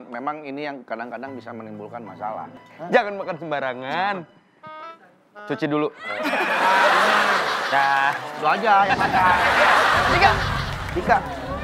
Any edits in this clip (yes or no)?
yes